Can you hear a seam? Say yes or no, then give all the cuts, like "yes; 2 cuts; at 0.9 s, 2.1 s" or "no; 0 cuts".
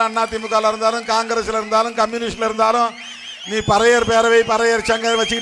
no; 0 cuts